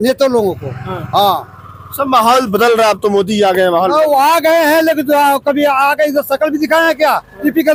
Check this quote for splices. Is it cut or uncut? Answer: uncut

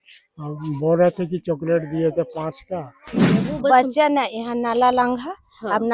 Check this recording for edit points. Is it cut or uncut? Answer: cut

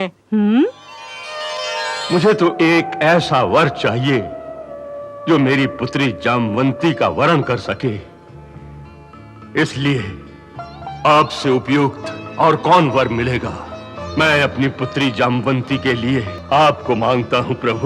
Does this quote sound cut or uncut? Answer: cut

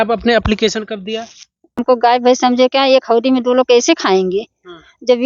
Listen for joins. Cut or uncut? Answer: cut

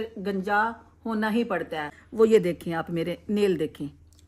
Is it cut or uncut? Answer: cut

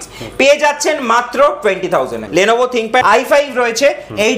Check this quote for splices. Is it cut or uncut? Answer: cut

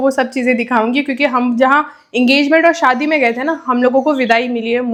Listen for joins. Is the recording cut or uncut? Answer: uncut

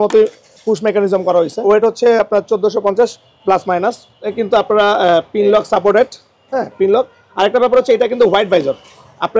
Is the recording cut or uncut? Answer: cut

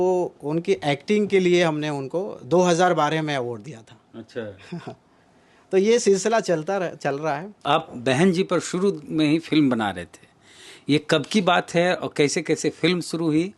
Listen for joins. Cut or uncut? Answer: uncut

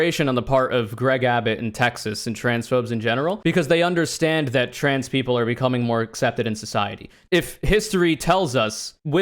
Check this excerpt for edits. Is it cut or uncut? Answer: cut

